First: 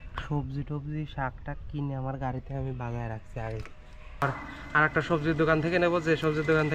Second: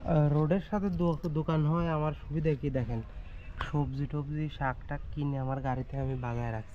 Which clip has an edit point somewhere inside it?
first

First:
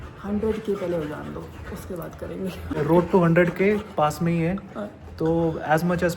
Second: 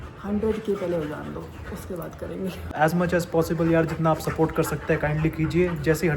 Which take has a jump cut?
second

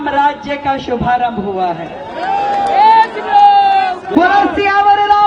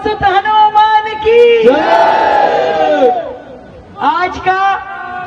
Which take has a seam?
first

